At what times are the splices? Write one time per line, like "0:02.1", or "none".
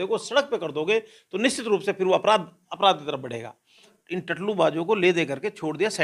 0:03.9